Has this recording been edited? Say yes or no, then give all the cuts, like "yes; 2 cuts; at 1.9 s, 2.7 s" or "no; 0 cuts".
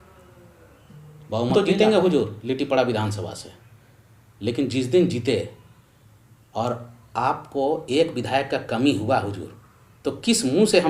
yes; 1 cut; at 1.5 s